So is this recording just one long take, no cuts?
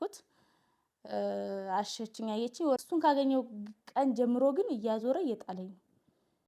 no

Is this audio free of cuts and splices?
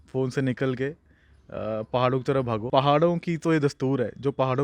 no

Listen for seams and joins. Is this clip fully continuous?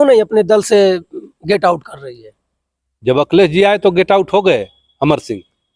yes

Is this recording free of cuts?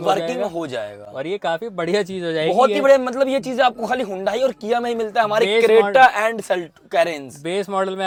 yes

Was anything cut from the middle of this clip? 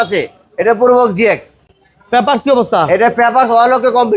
no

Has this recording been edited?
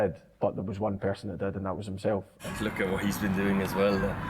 yes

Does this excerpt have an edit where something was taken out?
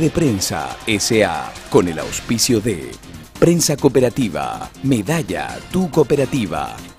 no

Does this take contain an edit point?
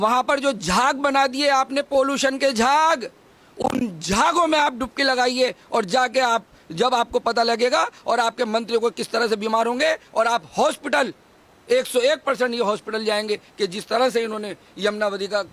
no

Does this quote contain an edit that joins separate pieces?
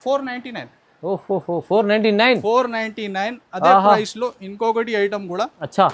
no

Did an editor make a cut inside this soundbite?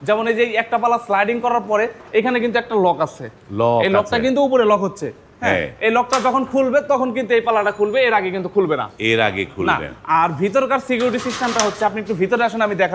no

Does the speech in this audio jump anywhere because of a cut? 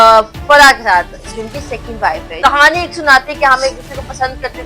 yes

